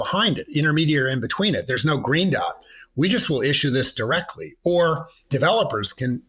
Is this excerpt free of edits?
no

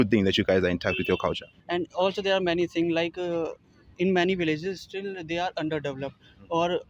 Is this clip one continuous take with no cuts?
no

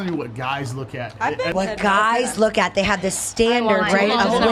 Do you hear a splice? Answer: yes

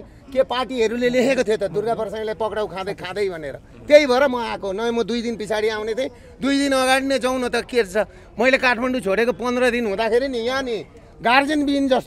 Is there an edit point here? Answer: no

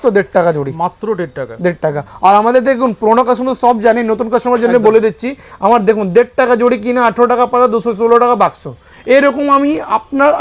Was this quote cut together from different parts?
no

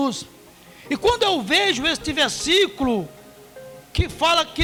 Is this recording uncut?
yes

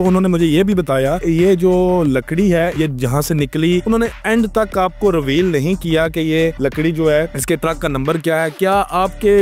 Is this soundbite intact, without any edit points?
yes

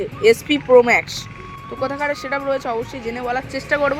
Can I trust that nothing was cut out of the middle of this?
yes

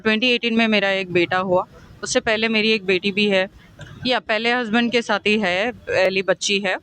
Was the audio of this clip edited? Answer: yes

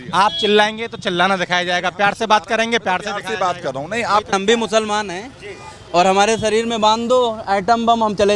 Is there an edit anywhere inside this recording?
yes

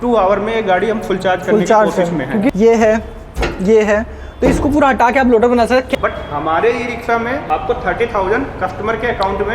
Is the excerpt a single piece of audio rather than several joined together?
no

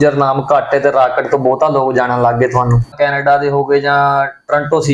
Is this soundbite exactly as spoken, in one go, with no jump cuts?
no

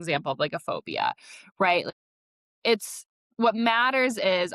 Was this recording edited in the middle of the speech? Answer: yes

